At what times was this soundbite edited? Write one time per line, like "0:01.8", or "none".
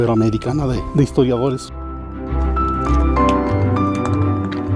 0:01.9